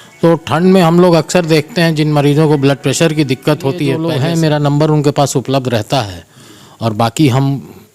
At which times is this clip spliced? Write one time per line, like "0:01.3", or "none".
0:04.1